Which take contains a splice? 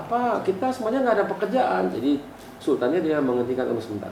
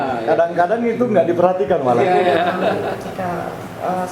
second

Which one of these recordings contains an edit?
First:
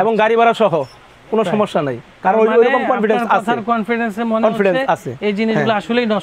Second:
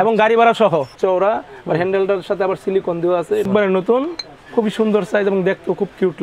second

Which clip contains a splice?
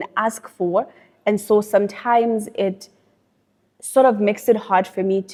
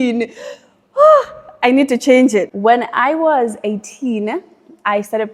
second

